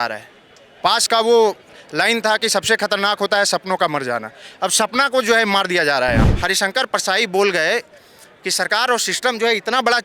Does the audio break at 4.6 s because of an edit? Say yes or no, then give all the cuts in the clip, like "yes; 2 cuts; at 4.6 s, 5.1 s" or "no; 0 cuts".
no; 1 cut; at 6.3 s